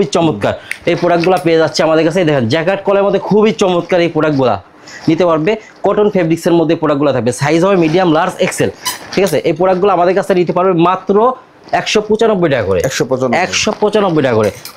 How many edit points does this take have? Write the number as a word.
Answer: zero